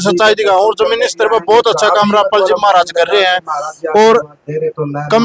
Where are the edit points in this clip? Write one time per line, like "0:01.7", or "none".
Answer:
none